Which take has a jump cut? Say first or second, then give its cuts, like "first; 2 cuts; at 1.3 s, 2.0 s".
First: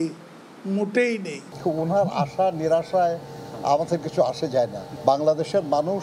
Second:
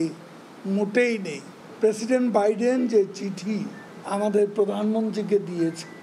first; 2 cuts; at 1.8 s, 4.9 s